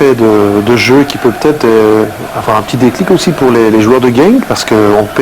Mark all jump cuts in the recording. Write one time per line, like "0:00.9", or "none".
0:02.8